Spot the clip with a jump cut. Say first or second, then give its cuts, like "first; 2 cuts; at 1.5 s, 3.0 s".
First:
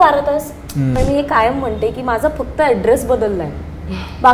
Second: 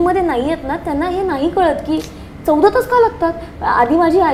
first; 1 cut; at 0.9 s